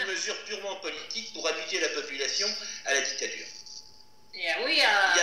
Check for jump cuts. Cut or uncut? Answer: uncut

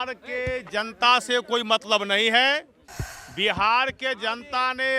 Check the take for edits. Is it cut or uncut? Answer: uncut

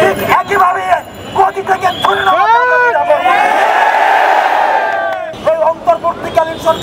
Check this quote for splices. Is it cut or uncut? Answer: cut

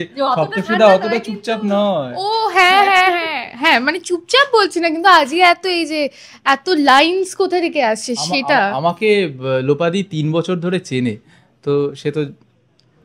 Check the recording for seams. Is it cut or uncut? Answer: uncut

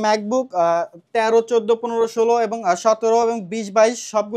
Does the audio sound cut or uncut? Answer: uncut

